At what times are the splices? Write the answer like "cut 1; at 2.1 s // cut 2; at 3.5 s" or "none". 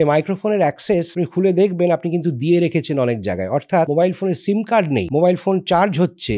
cut 1; at 1.1 s // cut 2; at 3.9 s // cut 3; at 5.1 s